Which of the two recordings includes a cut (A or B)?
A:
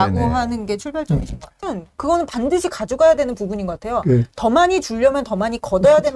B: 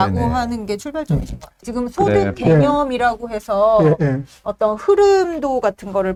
A